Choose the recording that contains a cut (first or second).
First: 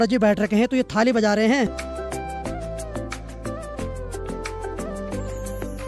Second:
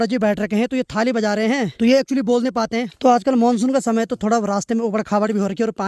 second